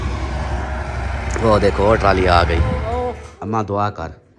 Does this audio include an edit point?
yes; 1 cut; at 2.8 s

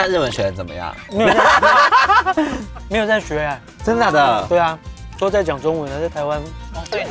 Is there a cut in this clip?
yes; 2 cuts; at 1.0 s, 5.1 s

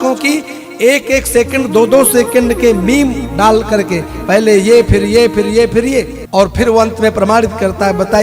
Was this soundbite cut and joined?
yes; 1 cut; at 6.2 s

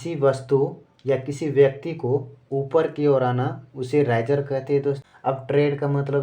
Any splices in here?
yes; 1 cut; at 5.0 s

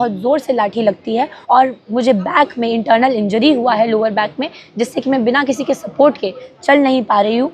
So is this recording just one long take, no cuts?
no; 1 cut; at 1.3 s

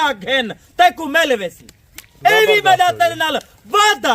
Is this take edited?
no; 0 cuts

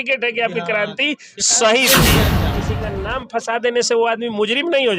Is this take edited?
yes; 1 cut; at 2.5 s

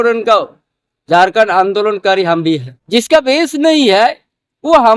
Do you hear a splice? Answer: yes; 1 cut; at 2.7 s

